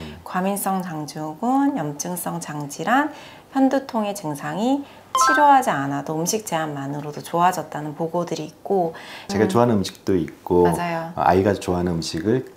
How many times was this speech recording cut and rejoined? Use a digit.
1